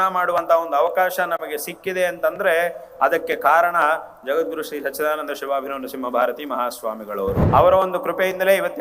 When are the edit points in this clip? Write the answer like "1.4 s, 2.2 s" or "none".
7.4 s

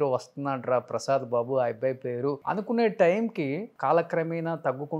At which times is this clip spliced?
2.4 s, 3.7 s

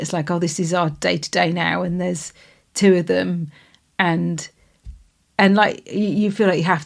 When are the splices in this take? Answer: none

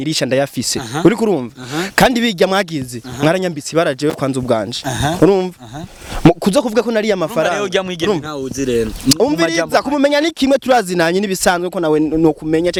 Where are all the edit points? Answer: none

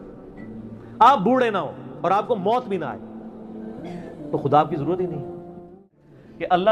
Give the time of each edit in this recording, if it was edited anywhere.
5.8 s

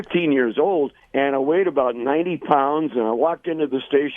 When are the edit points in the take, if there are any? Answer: 1.0 s

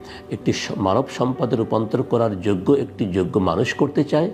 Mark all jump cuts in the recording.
none

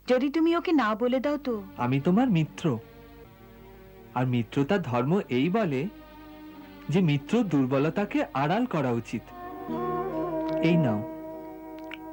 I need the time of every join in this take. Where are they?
1.7 s, 9.6 s

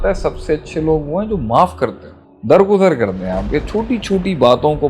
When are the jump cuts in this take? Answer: none

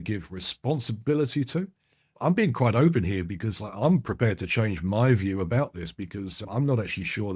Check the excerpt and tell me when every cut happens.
2.1 s, 6.4 s

